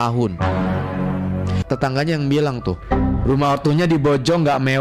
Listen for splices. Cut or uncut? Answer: cut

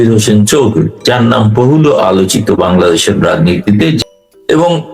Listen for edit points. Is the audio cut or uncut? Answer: cut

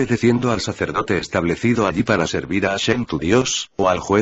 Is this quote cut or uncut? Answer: cut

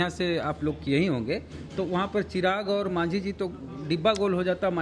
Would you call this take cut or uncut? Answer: uncut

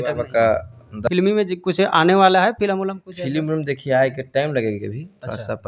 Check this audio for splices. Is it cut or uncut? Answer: cut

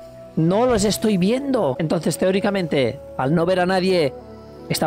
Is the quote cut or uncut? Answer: cut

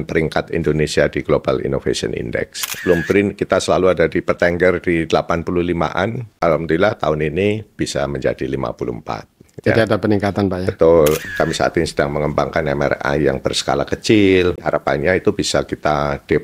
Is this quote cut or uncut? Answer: cut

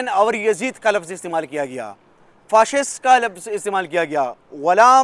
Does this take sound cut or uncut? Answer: uncut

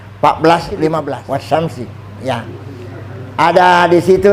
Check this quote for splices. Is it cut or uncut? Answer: cut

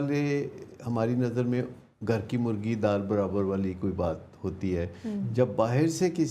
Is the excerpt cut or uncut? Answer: uncut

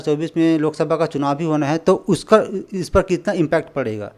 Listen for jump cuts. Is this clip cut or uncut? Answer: uncut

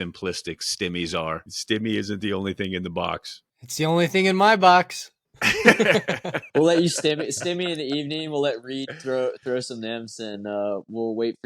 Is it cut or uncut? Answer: cut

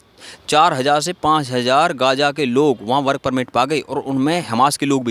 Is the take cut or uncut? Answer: uncut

